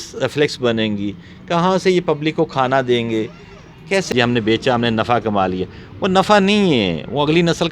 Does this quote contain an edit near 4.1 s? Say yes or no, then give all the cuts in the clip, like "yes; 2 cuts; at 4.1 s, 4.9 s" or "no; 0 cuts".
yes; 1 cut; at 4.1 s